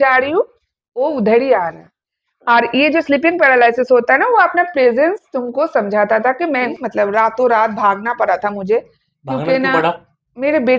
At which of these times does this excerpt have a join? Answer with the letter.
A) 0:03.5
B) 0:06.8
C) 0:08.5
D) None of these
B